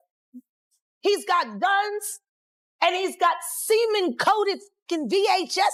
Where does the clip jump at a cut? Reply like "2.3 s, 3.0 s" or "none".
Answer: none